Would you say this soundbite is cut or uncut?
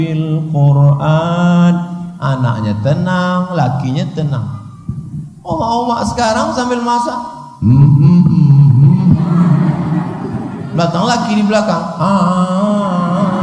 uncut